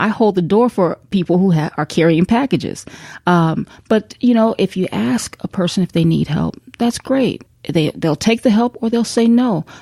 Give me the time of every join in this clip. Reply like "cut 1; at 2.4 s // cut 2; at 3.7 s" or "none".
cut 1; at 1.0 s // cut 2; at 7.5 s